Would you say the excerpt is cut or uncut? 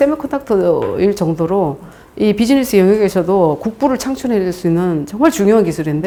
uncut